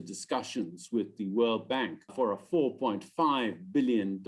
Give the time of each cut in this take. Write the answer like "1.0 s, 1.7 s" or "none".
2.1 s